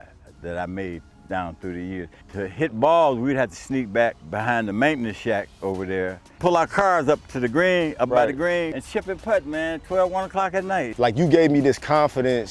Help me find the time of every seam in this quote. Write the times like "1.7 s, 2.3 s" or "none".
2.2 s, 4.3 s, 6.4 s, 8.8 s, 10.9 s